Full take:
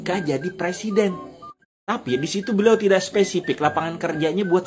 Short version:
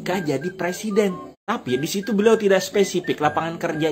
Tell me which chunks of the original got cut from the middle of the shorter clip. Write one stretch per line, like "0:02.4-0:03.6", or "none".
0:01.3-0:01.7